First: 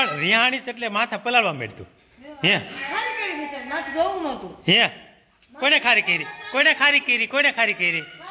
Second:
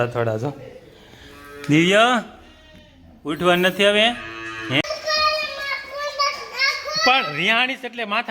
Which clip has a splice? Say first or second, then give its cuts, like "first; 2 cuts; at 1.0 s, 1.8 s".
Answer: second; 1 cut; at 4.8 s